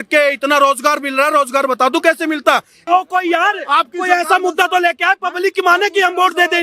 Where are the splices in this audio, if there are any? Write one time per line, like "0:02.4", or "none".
0:02.8